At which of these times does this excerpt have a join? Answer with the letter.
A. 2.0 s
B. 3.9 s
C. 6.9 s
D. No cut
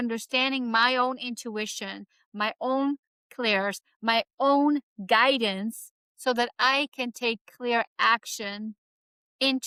D